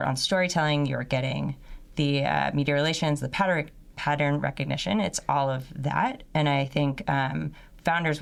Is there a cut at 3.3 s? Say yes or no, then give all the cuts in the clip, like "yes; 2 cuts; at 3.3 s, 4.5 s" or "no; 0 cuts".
no; 0 cuts